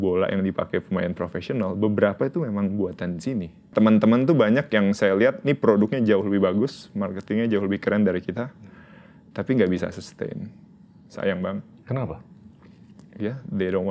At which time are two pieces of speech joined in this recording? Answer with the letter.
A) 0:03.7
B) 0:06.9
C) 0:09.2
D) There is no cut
A